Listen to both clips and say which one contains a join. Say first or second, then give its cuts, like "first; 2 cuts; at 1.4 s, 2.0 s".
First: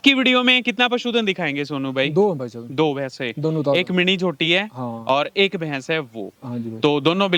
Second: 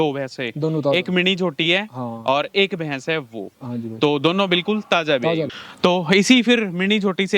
second; 1 cut; at 5.6 s